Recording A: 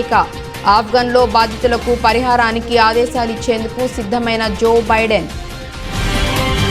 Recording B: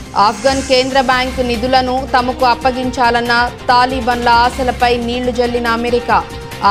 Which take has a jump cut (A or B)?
A